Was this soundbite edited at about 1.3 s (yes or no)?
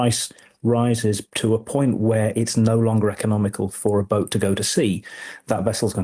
yes